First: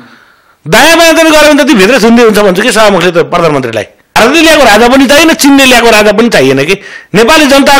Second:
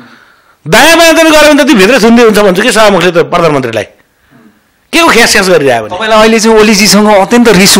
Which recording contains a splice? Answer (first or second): first